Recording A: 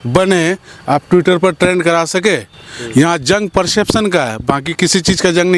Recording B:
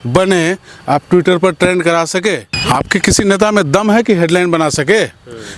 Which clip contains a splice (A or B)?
B